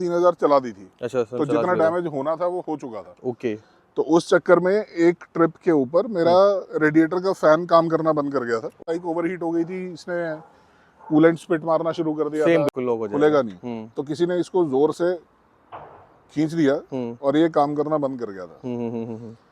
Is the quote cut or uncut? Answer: cut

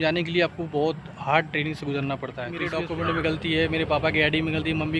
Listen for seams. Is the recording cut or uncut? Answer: cut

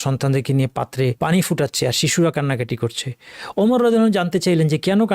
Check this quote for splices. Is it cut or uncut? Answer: cut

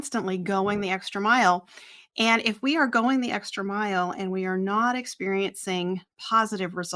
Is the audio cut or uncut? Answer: uncut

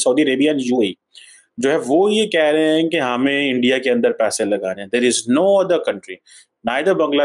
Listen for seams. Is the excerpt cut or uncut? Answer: uncut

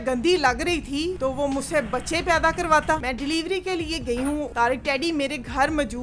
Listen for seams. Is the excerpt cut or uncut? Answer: cut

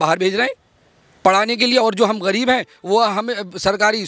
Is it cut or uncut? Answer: uncut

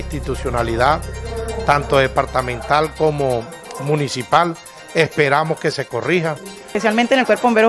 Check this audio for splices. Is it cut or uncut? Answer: cut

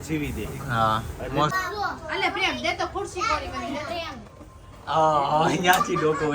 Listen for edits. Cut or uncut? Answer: cut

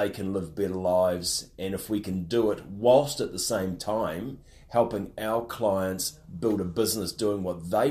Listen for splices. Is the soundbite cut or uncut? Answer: uncut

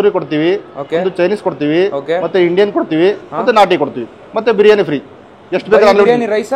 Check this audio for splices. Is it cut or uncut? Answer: uncut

